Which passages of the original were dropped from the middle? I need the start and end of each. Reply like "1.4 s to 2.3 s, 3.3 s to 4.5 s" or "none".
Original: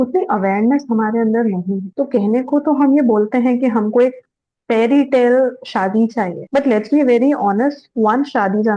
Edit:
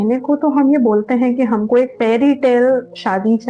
4.2 s to 4.6 s